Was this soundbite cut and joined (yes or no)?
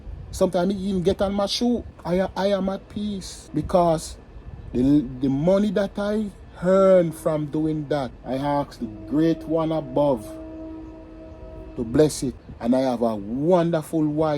yes